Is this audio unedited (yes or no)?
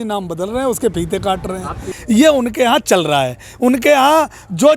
no